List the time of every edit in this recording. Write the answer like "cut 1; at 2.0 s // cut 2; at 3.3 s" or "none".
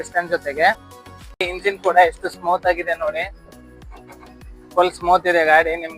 cut 1; at 1.5 s